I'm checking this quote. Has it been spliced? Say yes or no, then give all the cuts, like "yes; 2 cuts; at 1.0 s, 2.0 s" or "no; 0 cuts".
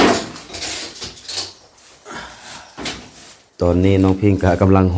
yes; 1 cut; at 3.6 s